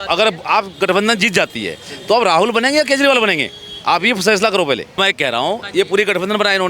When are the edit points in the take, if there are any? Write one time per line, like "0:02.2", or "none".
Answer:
0:05.0

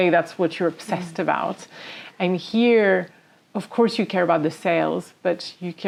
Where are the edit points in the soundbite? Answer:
none

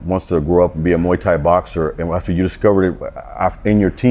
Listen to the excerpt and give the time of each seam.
none

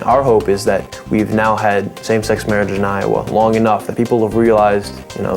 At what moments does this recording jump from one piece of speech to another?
0:00.9

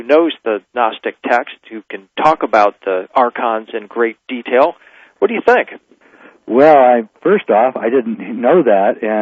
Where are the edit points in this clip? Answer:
none

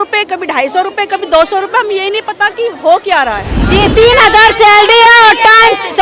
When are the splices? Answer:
0:03.5

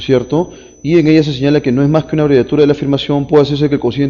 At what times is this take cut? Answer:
0:02.9

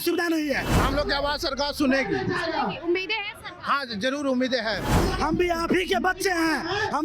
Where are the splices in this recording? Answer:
0:00.8
0:05.0

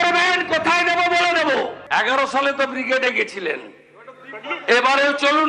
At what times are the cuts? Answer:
0:01.8

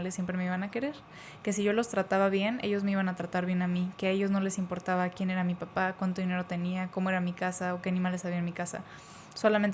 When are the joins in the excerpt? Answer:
none

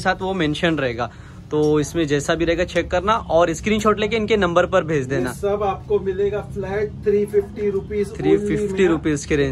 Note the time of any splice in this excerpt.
none

